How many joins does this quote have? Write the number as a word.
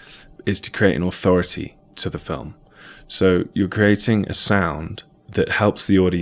one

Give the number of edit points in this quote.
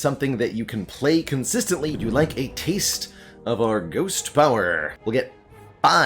two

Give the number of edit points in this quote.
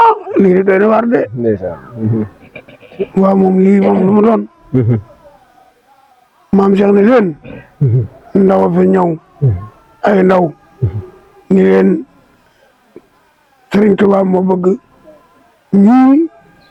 zero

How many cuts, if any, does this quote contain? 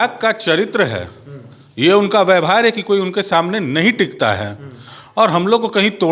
zero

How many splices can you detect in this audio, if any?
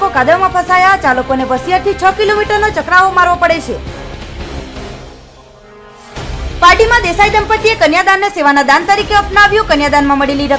zero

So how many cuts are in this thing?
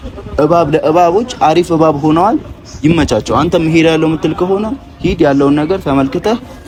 zero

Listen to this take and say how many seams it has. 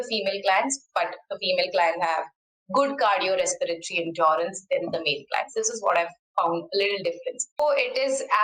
one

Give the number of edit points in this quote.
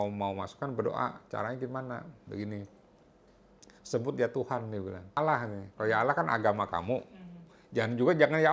one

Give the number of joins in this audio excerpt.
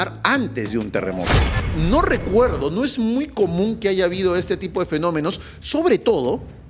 one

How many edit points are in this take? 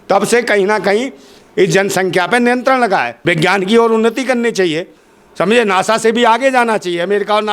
one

